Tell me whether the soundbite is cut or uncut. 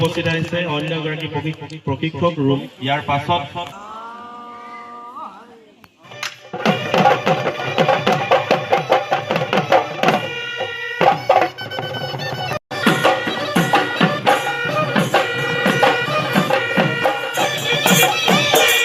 cut